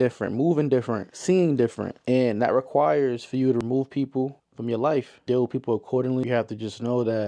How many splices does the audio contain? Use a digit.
0